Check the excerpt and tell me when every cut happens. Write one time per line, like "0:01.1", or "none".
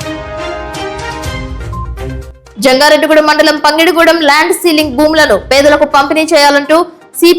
0:02.2